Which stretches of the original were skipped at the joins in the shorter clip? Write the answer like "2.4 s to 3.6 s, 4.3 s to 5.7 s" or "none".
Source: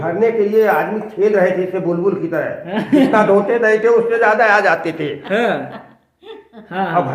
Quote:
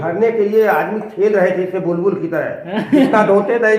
none